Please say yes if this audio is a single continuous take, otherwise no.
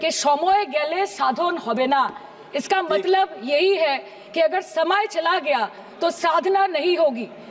yes